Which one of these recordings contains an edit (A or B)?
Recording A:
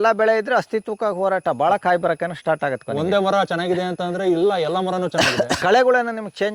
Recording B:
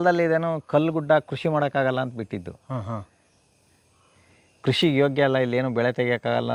A